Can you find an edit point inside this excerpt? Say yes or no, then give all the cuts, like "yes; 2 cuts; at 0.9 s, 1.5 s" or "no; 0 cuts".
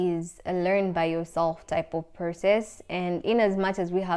no; 0 cuts